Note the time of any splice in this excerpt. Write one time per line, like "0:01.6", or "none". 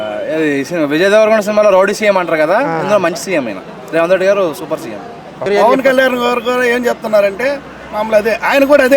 0:05.5